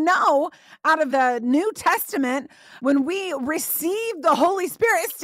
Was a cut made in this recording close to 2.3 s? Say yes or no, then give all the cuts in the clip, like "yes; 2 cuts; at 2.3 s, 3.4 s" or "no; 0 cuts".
no; 1 cut; at 1.1 s